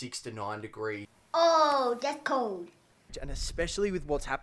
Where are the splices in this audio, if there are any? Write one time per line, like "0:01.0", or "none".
0:03.2

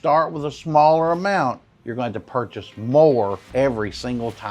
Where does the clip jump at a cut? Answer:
0:01.7
0:03.4

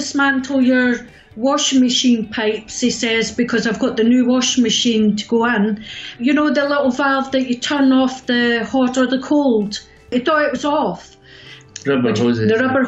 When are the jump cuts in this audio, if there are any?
0:06.1
0:10.1
0:11.7

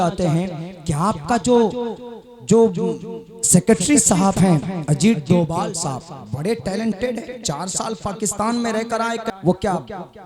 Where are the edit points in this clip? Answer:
0:09.3

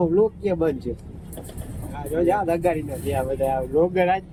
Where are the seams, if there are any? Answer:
none

